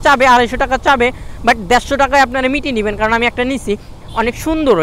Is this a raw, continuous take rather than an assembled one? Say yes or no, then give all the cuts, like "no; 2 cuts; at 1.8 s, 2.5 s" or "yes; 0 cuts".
yes; 0 cuts